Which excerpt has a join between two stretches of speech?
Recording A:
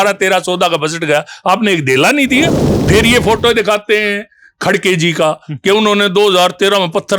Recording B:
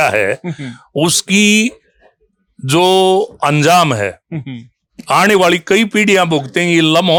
A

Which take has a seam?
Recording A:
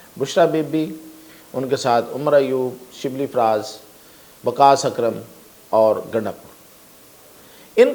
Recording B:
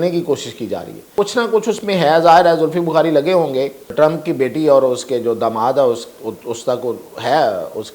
B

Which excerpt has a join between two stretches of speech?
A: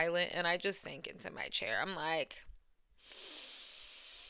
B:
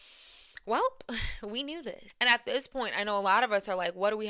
B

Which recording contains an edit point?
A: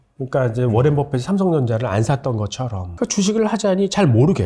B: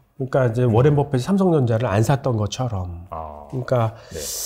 A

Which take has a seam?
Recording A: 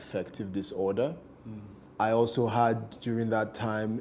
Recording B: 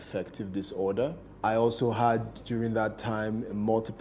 B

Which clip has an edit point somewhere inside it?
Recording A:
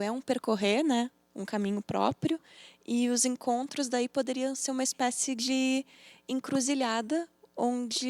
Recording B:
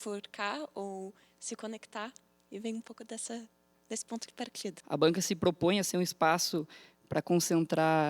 B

